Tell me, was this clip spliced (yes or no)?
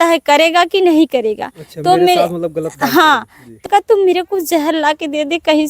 yes